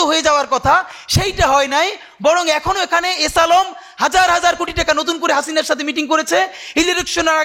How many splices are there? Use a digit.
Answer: 0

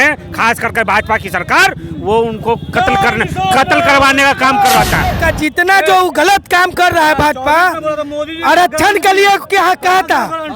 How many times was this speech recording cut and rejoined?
1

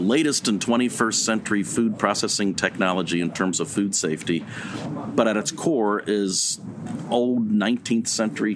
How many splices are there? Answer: 2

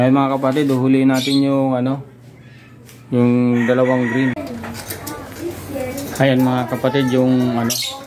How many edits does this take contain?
1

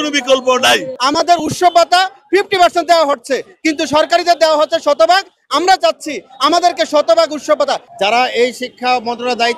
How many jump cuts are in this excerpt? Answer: 2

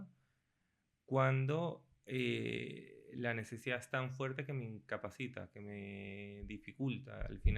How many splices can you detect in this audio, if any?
0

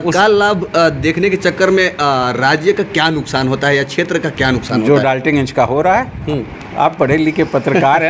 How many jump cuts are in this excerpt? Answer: 0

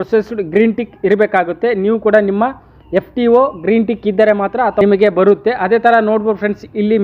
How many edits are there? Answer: 1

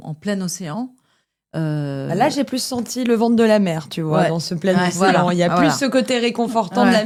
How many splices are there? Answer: 0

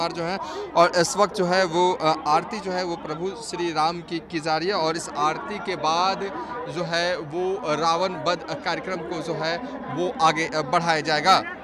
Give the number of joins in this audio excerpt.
0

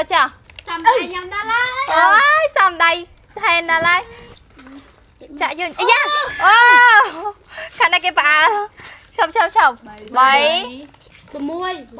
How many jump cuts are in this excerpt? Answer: 1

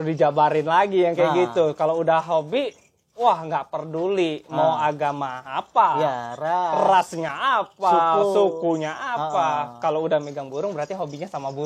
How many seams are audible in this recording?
0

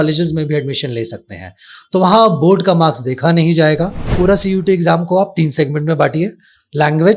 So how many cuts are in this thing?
1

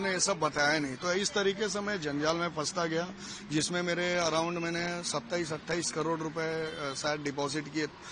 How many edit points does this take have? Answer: 0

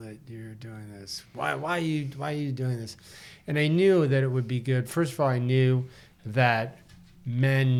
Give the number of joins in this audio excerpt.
0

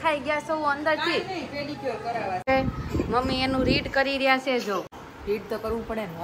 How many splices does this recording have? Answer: 2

